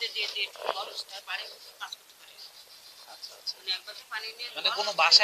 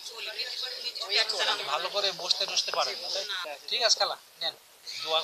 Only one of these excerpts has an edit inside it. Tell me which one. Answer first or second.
second